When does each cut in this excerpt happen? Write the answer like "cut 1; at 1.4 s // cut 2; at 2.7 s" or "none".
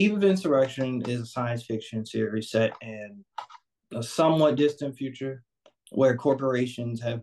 none